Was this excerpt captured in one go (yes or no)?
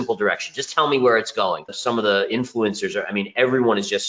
no